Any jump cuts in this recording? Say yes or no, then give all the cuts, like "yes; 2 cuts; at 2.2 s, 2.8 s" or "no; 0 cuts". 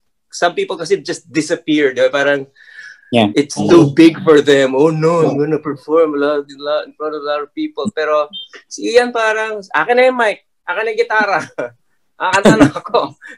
no; 0 cuts